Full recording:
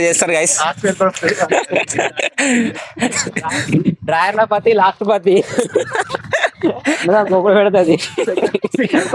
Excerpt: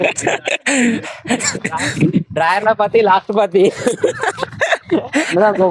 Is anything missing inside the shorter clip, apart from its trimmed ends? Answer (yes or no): no